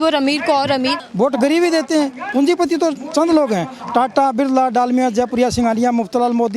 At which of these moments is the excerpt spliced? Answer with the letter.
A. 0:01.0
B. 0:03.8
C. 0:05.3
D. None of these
A